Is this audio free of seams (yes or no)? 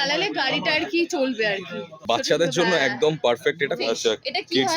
no